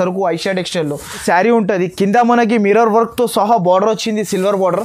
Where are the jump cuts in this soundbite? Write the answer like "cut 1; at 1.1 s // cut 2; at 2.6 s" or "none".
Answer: cut 1; at 1.2 s